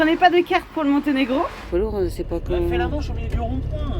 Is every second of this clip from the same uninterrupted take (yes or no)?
no